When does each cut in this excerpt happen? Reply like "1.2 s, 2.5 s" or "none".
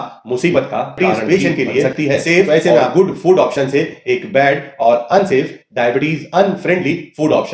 1.0 s